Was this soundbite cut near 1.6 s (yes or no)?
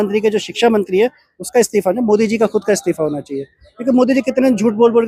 no